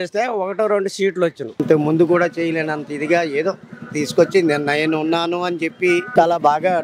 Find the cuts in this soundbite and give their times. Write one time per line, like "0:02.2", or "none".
0:01.6
0:06.1